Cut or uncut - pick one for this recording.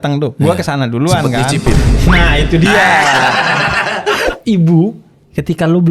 cut